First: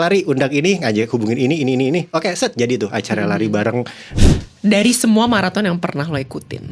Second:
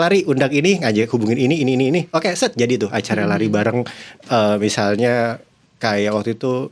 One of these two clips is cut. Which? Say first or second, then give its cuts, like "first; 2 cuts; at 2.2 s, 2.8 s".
first; 1 cut; at 4.1 s